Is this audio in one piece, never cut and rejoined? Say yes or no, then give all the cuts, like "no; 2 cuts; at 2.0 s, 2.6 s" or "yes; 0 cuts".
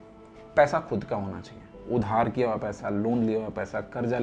yes; 0 cuts